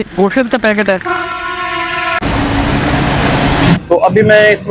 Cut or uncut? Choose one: cut